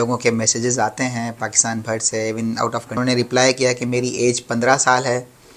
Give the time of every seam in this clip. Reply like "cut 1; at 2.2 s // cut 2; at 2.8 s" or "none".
cut 1; at 3.0 s